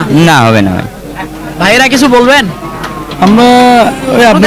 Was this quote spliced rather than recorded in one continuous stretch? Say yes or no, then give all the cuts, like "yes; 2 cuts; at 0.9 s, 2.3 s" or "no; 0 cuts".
no; 0 cuts